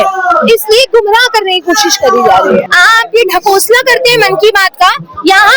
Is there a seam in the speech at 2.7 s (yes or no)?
yes